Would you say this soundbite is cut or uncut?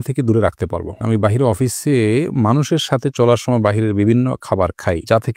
cut